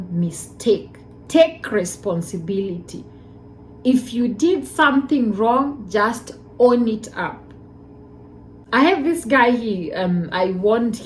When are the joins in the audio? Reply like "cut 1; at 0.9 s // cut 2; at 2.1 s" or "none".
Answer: none